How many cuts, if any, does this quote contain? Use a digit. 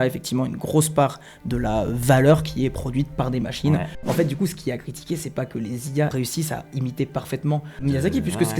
3